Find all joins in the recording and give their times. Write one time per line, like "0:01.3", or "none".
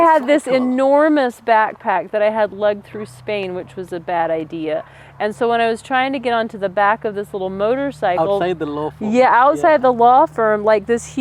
none